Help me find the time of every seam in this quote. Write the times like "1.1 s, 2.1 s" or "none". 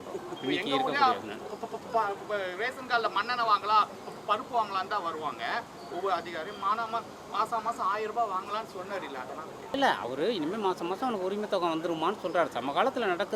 9.7 s